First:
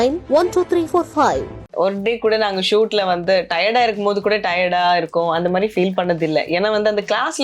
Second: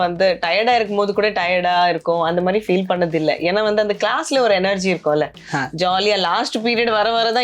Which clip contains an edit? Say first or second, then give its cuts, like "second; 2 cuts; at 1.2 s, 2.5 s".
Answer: first; 1 cut; at 1.7 s